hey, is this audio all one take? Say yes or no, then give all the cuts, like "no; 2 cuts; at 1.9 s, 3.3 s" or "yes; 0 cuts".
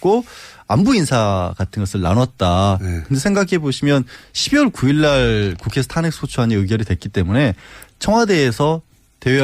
no; 1 cut; at 2.2 s